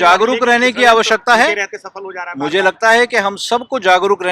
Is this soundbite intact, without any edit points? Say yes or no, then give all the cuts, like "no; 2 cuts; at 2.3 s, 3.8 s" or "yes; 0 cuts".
yes; 0 cuts